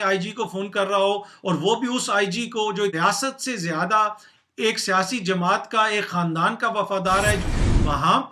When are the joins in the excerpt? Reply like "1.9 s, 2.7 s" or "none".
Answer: 7.4 s